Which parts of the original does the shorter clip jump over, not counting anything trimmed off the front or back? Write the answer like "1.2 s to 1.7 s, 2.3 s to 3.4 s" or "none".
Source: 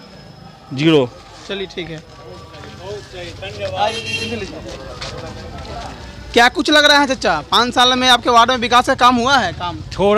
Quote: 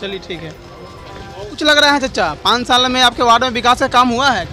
3.1 s to 6.7 s